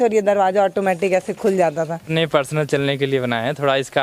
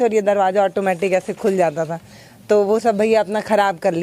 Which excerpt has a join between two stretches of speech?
first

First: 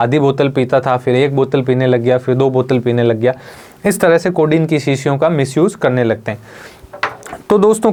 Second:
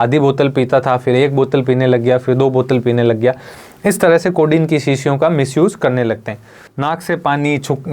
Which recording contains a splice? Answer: second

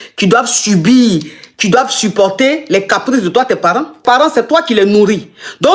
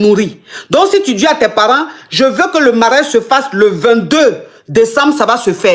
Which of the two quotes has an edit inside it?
first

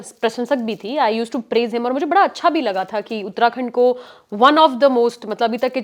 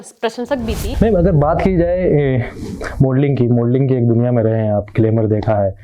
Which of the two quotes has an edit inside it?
second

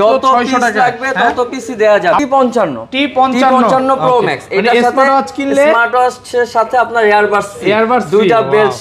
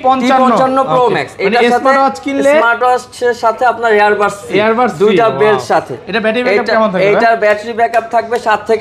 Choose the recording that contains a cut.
first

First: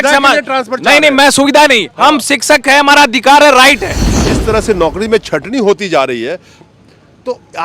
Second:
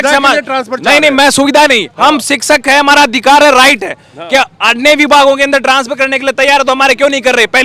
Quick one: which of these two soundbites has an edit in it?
first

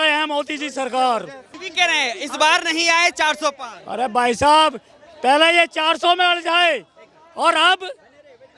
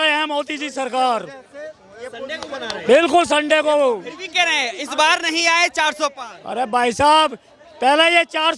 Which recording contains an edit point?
first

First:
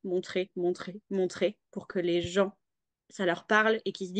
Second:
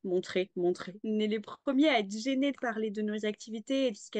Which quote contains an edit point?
second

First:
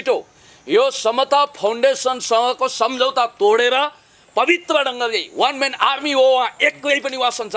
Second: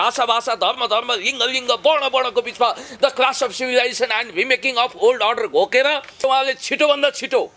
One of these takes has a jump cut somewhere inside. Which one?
second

